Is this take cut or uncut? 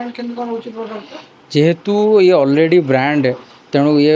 uncut